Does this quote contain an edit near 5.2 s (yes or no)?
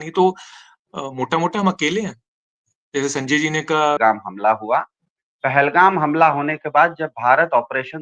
no